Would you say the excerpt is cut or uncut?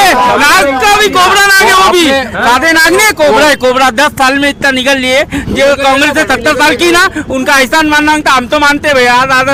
uncut